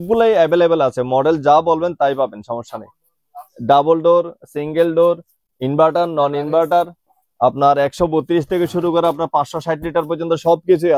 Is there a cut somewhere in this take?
no; 0 cuts

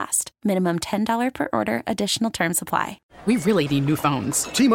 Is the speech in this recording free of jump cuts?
no; 1 cut; at 3.1 s

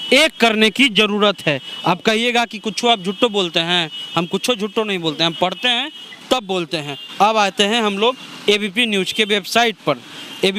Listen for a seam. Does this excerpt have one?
no; 0 cuts

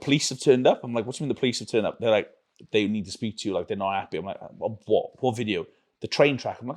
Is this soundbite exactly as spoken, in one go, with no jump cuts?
yes; 0 cuts

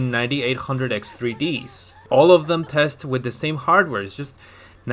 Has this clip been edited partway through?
yes; 1 cut; at 2.0 s

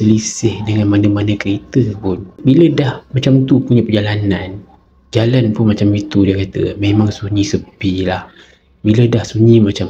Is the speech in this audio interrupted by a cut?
no; 0 cuts

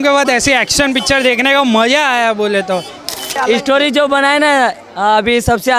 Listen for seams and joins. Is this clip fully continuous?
no; 1 cut; at 3.3 s

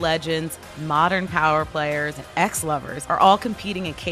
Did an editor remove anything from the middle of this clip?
yes; 1 cut; at 2.6 s

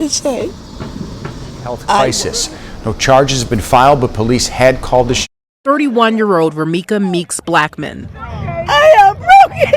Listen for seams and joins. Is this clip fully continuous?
no; 2 cuts; at 2.2 s, 5.5 s

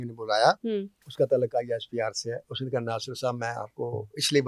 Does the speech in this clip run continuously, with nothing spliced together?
no; 1 cut; at 1.0 s

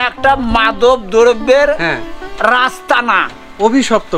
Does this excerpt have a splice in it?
no; 0 cuts

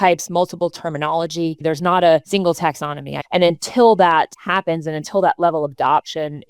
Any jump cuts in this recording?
yes; 3 cuts; at 1.6 s, 2.9 s, 4.4 s

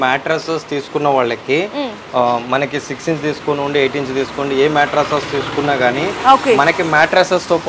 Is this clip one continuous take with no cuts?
yes; 0 cuts

